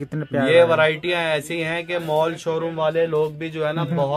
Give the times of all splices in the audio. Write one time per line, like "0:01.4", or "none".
none